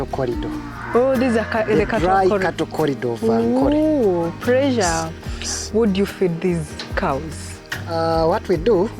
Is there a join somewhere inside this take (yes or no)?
yes